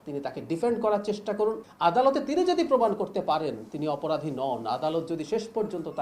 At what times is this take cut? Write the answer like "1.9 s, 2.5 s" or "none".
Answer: 1.7 s